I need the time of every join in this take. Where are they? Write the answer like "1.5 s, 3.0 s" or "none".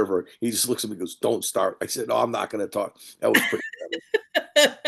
none